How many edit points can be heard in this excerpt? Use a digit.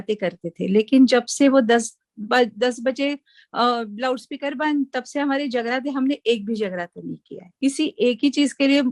1